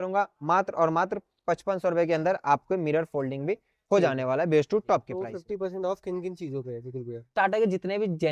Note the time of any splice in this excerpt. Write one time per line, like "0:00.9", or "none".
0:05.3